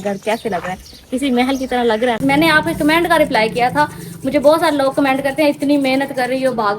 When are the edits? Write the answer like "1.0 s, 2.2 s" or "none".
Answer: 2.2 s